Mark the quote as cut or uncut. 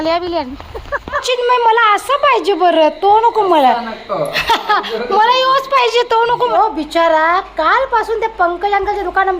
cut